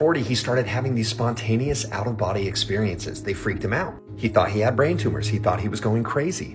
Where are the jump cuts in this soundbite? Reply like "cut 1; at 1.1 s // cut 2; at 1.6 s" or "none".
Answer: none